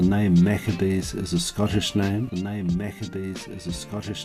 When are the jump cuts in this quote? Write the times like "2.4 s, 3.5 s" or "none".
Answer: 2.3 s